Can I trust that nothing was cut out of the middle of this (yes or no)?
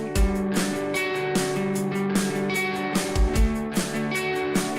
no